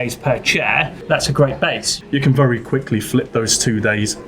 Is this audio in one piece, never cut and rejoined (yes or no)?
no